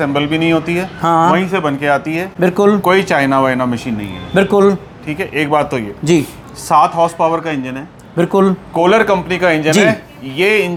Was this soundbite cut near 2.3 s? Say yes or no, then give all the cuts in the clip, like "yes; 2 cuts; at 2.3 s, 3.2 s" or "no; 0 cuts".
no; 0 cuts